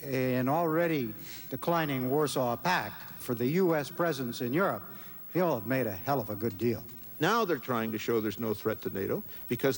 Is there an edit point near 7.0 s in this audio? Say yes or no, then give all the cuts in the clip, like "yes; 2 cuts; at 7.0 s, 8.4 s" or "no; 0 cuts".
yes; 2 cuts; at 3.2 s, 7.0 s